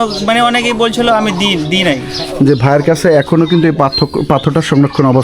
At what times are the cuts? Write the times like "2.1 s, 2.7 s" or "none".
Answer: 2.2 s